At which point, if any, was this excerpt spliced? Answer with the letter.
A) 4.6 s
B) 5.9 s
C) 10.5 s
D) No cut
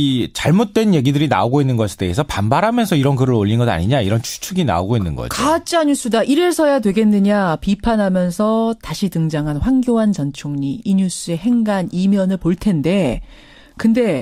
D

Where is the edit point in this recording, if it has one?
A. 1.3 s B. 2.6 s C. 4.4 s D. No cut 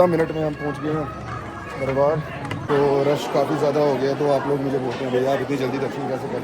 B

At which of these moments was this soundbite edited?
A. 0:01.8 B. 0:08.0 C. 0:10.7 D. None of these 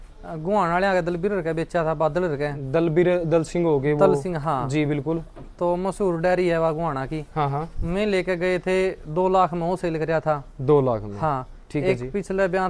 D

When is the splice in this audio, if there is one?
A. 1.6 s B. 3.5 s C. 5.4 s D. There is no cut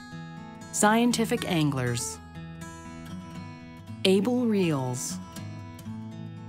C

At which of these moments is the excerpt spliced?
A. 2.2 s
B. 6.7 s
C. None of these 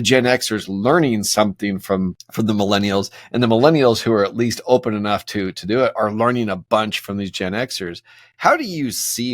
A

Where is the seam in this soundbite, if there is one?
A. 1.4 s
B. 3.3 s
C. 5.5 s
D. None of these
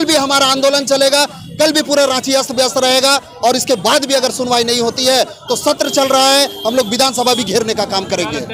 D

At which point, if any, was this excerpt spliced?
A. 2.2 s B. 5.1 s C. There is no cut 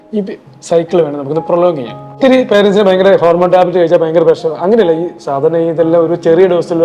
A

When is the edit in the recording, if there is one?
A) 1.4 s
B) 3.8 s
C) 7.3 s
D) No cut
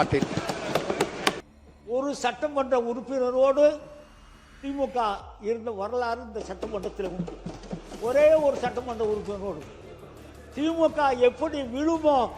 A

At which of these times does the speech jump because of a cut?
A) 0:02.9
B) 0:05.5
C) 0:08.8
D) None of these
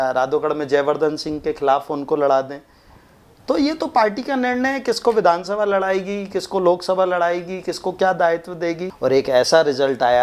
C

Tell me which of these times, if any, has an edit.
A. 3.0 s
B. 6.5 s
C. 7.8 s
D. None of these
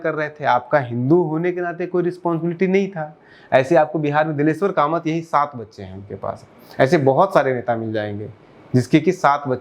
D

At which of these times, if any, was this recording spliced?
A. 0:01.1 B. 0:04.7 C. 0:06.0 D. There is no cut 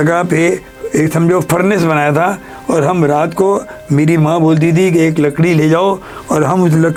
D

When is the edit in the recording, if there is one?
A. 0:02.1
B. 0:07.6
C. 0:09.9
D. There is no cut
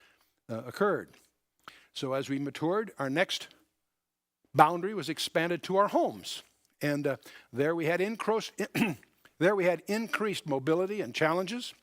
D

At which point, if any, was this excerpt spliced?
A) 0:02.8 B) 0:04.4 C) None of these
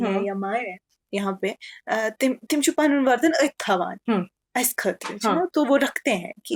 C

